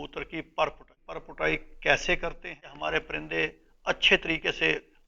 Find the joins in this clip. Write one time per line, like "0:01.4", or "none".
0:01.2
0:02.7